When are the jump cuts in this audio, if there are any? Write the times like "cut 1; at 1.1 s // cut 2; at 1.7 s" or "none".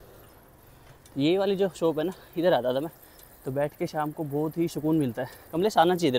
none